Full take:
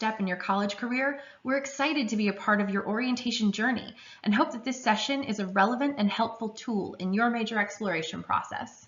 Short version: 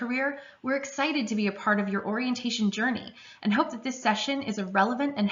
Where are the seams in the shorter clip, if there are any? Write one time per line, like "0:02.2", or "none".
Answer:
none